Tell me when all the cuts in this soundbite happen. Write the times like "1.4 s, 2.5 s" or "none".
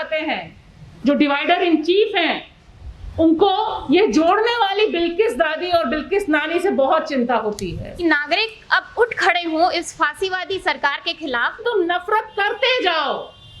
8.0 s, 11.6 s